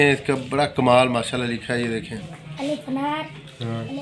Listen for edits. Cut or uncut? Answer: cut